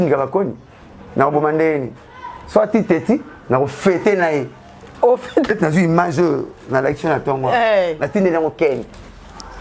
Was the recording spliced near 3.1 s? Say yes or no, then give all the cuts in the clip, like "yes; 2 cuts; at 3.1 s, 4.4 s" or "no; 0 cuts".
no; 1 cut; at 5.5 s